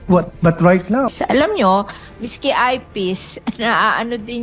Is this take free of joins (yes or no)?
no